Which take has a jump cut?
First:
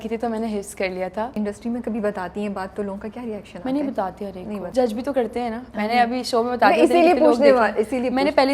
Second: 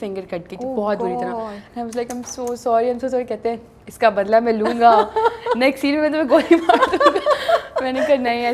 first; 2 cuts; at 1.3 s, 4.7 s

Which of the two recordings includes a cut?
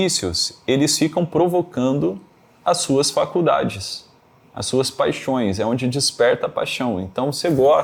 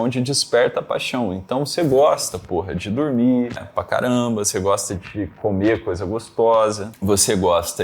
second; 2 cuts; at 3.6 s, 6.9 s

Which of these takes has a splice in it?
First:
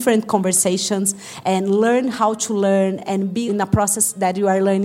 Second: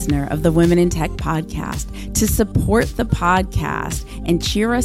first; 2 cuts; at 1.2 s, 3.5 s

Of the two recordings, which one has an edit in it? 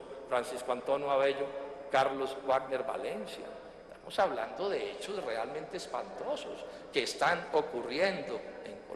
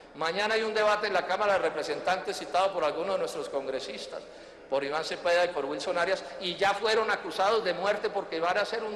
second; 1 cut; at 7.0 s

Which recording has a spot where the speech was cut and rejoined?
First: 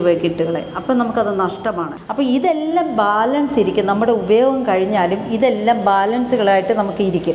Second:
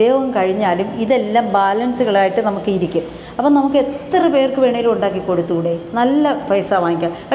first; 1 cut; at 2.0 s

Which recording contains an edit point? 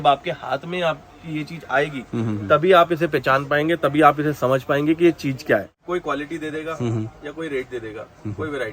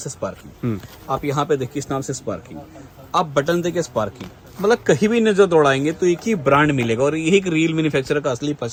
first; 1 cut; at 5.7 s

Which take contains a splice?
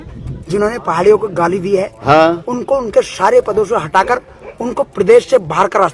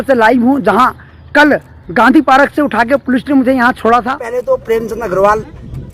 second; 1 cut; at 4.2 s

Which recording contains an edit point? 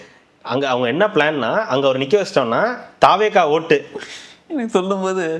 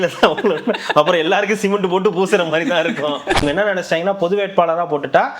second; 1 cut; at 3.4 s

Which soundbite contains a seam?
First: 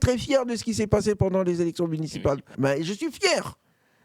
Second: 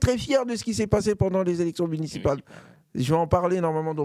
first; 1 cut; at 2.5 s

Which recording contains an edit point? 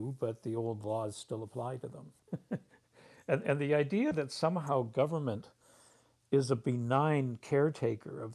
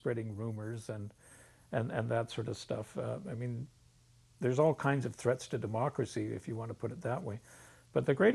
first; 1 cut; at 2.1 s

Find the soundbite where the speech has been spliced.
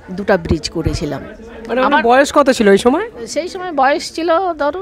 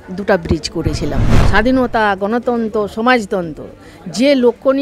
second; 1 cut; at 1.4 s

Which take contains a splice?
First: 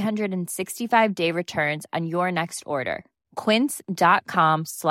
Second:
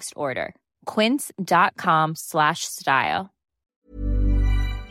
second; 1 cut; at 3.7 s

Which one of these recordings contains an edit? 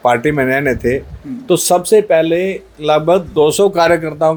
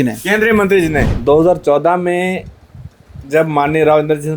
second; 1 cut; at 1.1 s

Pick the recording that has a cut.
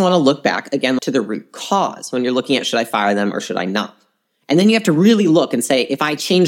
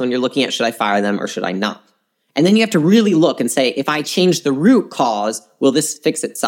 first; 1 cut; at 1.0 s

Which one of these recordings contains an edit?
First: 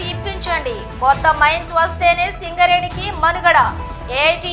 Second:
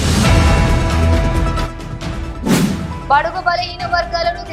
second; 2 cuts; at 1.3 s, 2.9 s

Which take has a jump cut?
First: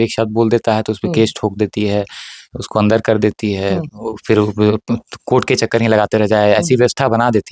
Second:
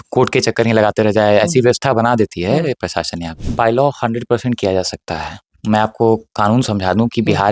second; 1 cut; at 3.3 s

